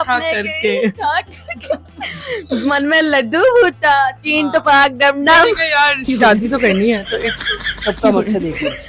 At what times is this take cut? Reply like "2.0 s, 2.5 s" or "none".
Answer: none